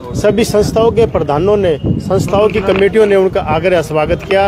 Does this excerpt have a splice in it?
no; 0 cuts

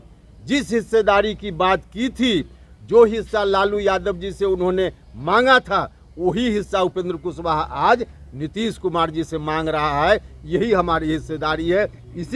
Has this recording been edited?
no; 0 cuts

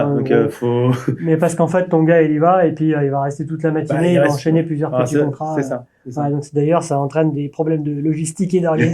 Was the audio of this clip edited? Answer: no; 0 cuts

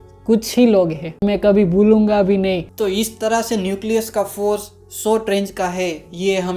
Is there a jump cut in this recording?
yes; 2 cuts; at 1.2 s, 2.7 s

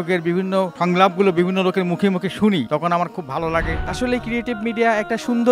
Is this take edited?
yes; 1 cut; at 3.8 s

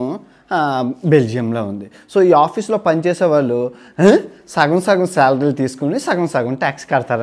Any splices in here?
no; 0 cuts

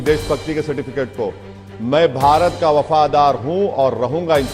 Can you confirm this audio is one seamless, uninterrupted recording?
yes; 0 cuts

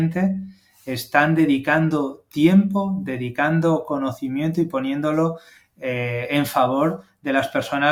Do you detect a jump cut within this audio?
no; 0 cuts

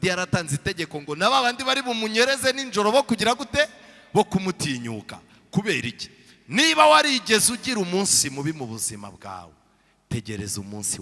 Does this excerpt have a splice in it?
no; 0 cuts

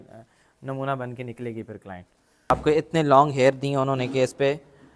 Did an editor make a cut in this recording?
yes; 1 cut; at 2.5 s

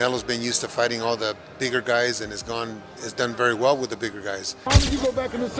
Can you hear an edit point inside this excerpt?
yes; 1 cut; at 4.7 s

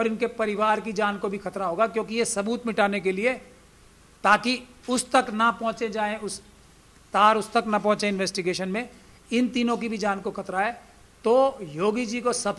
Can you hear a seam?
no; 0 cuts

